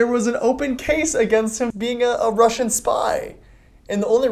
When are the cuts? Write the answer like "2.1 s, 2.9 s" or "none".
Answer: 1.7 s